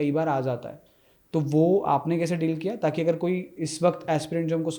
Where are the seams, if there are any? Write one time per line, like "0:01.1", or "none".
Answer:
none